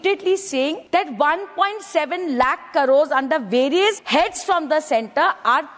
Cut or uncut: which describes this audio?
cut